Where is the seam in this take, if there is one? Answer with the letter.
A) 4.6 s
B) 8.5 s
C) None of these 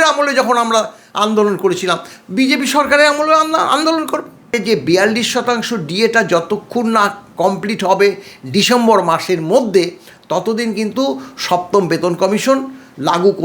A